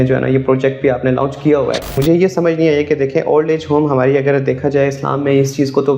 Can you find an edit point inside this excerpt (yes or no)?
yes